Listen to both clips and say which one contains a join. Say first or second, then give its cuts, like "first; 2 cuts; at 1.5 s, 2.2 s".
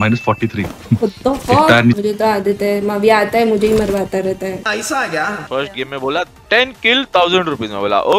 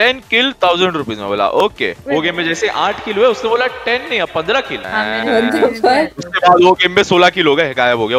first; 3 cuts; at 2.0 s, 4.6 s, 5.4 s